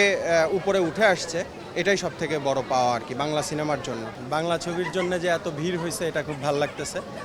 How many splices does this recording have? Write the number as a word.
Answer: one